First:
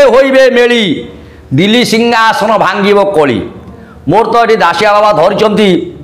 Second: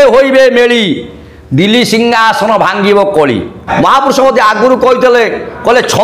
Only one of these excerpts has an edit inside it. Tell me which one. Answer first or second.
second